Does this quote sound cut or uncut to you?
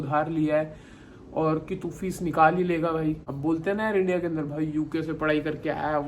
cut